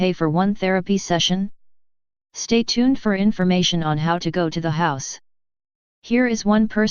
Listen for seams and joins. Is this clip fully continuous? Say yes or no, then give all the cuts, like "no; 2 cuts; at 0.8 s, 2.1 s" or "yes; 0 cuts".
no; 1 cut; at 4.1 s